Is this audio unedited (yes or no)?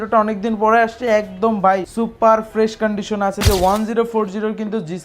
no